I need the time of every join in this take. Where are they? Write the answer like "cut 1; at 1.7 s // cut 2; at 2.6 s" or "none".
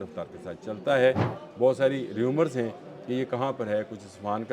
cut 1; at 1.4 s